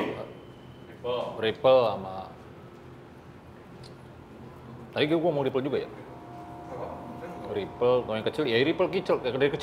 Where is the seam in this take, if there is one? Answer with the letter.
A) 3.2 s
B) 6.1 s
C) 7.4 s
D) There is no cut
D